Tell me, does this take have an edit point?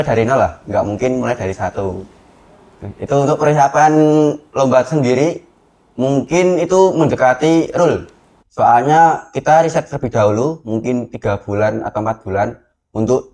no; 0 cuts

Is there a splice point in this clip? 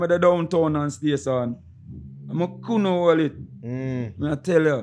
no; 0 cuts

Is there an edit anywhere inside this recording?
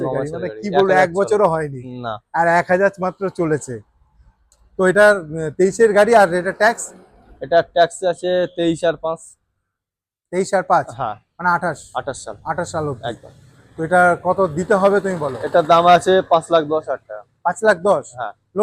no; 0 cuts

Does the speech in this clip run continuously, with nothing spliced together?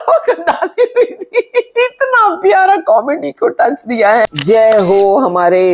no; 1 cut; at 4.4 s

